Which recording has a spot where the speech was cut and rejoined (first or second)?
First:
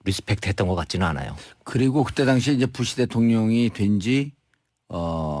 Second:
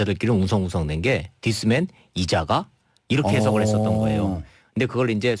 first